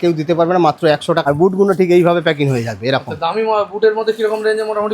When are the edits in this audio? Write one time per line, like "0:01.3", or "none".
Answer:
0:01.2